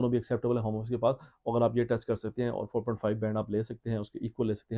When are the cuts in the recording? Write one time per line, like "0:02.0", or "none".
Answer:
none

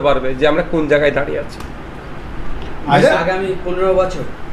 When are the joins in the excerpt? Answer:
none

